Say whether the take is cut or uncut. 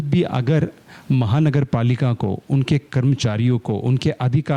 uncut